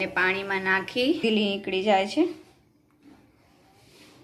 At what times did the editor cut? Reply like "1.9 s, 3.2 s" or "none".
1.2 s